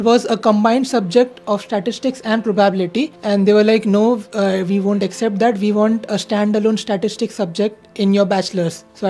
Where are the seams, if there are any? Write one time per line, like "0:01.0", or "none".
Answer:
none